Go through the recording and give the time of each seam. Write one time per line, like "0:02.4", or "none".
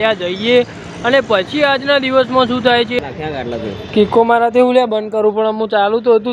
0:03.0